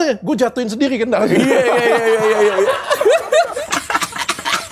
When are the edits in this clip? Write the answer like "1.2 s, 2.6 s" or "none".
3.5 s